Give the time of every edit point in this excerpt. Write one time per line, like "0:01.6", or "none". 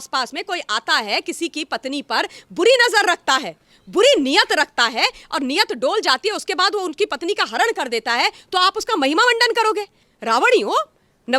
0:10.0